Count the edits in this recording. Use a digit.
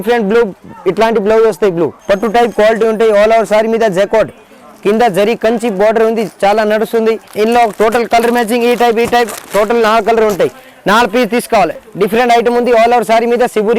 3